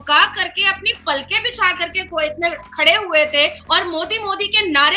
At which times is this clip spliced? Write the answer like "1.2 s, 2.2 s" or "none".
3.6 s